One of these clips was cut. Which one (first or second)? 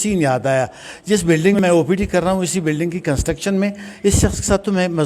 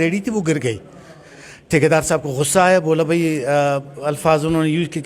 first